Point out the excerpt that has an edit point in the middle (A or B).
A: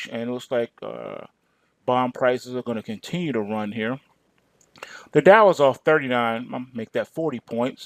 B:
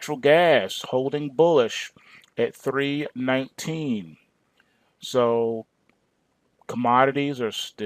B